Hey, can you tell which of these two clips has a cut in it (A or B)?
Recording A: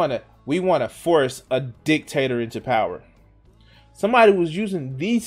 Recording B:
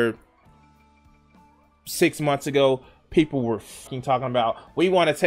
B